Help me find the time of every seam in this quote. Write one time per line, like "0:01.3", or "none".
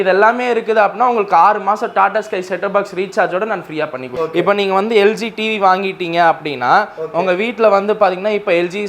0:04.1